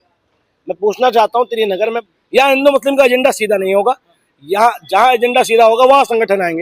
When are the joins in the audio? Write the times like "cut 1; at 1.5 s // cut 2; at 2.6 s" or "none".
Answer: cut 1; at 2.0 s